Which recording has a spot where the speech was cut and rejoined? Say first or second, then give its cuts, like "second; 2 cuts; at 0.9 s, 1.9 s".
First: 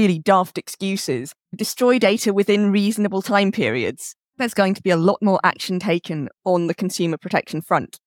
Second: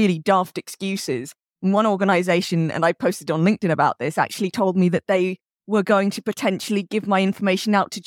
first; 2 cuts; at 1.6 s, 4.4 s